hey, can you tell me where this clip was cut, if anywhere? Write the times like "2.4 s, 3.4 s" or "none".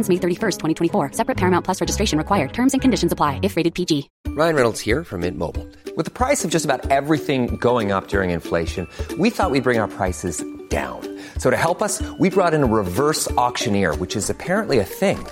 4.2 s